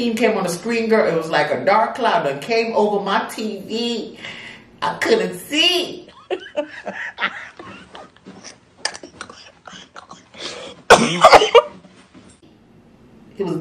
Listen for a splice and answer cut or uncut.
uncut